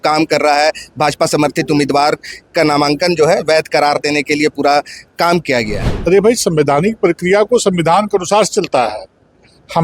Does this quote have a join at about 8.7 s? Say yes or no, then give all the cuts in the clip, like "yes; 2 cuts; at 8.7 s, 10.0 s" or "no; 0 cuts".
no; 1 cut; at 5.8 s